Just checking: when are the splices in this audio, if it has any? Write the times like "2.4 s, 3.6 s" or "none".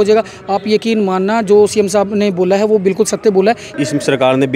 3.7 s